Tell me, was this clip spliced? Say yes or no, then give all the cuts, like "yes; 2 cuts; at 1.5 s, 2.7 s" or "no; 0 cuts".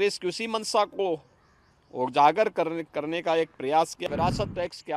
yes; 1 cut; at 4.1 s